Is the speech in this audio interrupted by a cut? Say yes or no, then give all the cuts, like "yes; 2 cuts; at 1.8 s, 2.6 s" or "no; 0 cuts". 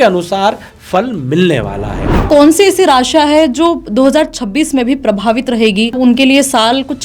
yes; 2 cuts; at 2.3 s, 6.0 s